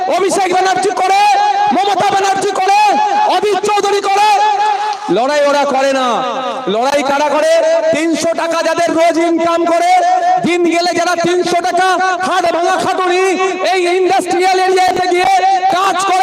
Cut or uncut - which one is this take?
uncut